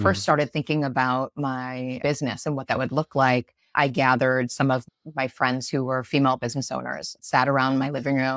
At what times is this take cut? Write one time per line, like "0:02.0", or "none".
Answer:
0:02.0
0:04.8